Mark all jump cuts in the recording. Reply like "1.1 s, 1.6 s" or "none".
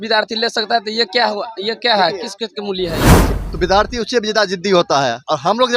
3.3 s

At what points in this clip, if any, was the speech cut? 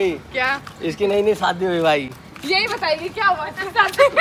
none

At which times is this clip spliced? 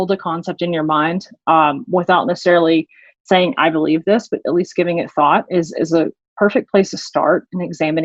none

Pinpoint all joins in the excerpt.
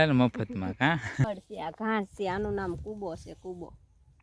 1.2 s

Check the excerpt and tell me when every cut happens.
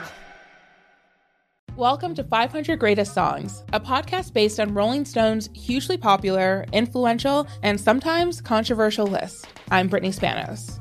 1.5 s

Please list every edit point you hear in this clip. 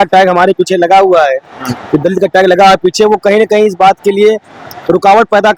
none

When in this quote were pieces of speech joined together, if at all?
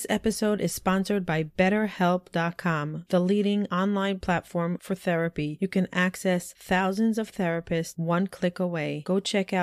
none

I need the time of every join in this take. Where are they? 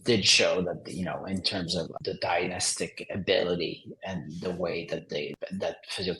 1.9 s, 5.4 s

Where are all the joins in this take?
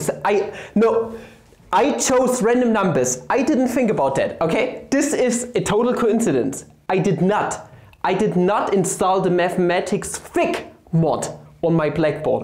none

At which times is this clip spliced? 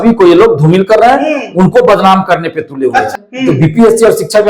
3.1 s

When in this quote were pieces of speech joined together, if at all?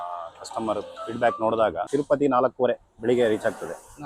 1.8 s

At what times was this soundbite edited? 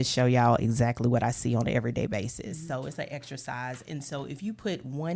none

